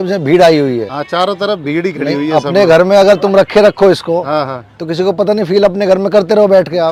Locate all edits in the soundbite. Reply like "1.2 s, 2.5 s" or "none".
none